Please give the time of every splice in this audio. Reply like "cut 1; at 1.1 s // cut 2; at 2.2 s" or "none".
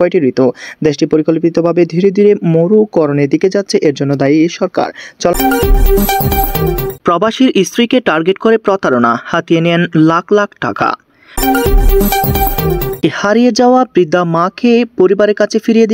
cut 1; at 5.3 s // cut 2; at 6.9 s // cut 3; at 11.4 s // cut 4; at 13.0 s